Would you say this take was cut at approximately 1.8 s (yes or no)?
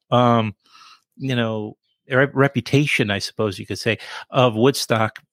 no